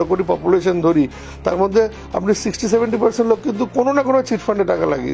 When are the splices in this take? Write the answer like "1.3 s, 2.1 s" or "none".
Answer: none